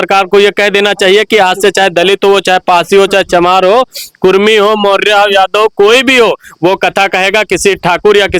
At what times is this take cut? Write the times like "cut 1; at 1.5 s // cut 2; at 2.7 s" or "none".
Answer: none